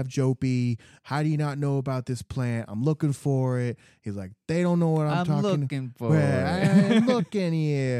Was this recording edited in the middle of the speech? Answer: yes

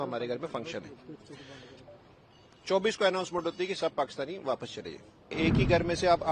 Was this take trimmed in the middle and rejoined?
yes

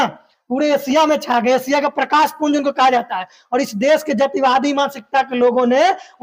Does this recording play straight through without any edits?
yes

